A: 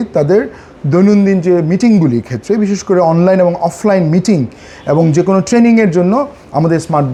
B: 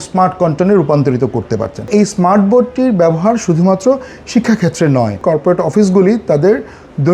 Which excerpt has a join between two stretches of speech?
B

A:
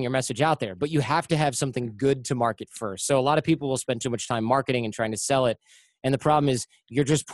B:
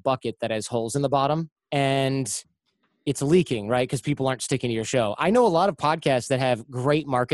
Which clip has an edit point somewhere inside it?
B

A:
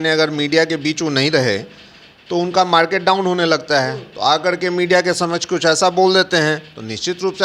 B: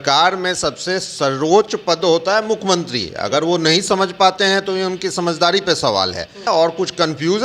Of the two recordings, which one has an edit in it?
B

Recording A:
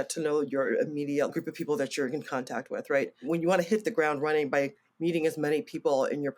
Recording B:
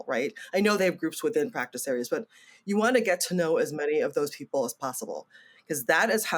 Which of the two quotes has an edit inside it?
A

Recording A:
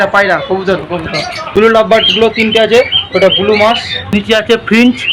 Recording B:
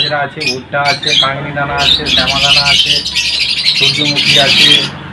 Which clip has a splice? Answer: A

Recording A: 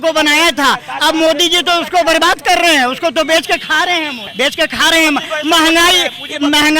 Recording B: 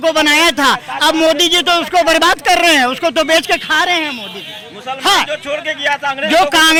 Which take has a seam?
A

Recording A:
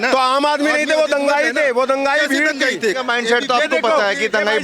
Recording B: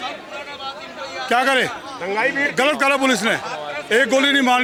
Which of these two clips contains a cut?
A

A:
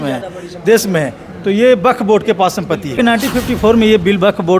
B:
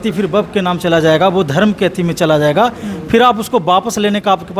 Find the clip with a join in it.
A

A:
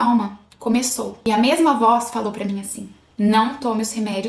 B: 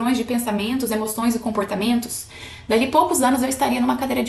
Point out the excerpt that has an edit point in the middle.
A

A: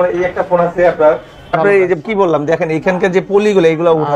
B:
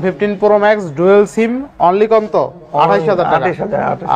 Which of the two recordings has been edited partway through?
A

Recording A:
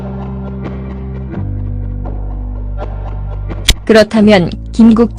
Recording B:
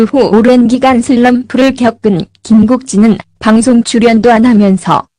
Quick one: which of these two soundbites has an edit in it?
A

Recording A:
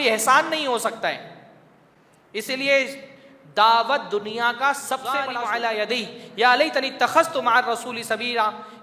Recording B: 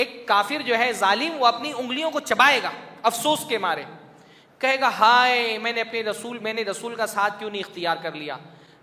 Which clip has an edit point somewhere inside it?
A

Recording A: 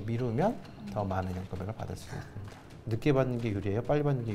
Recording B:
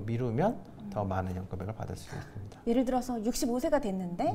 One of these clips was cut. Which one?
A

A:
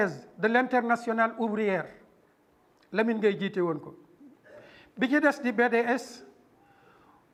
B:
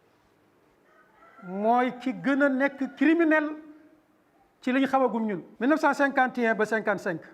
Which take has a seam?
B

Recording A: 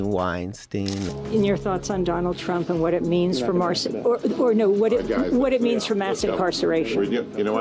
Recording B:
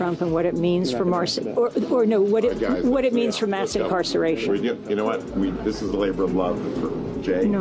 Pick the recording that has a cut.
A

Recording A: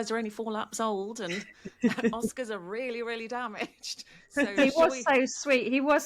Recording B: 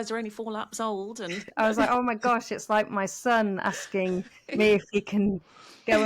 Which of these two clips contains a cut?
B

